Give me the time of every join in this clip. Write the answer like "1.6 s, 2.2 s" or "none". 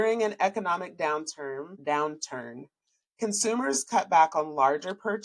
1.8 s